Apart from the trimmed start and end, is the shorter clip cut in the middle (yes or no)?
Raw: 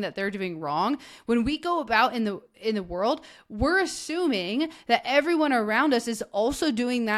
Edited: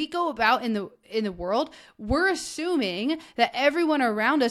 no